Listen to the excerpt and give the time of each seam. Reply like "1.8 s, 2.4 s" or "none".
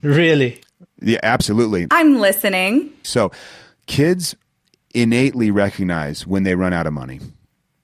1.9 s, 3.0 s

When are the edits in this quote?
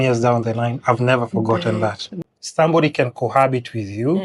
2.1 s

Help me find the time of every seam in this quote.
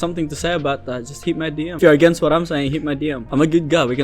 1.8 s, 3.2 s

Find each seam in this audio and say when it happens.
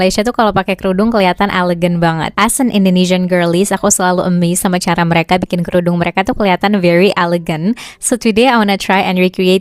none

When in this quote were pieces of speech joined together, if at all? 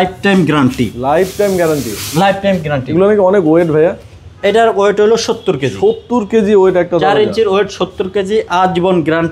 none

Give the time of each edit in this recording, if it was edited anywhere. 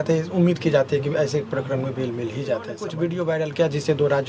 2.8 s

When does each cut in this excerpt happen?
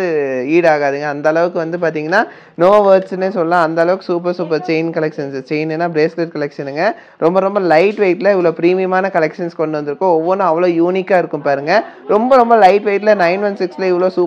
none

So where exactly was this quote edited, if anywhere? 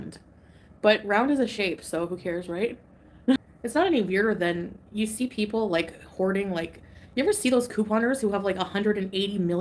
3.5 s

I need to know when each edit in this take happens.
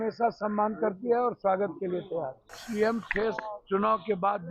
2.6 s

